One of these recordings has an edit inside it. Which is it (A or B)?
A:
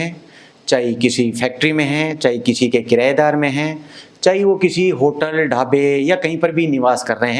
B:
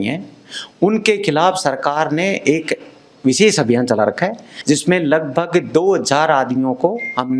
B